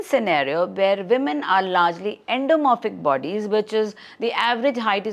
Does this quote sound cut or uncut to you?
uncut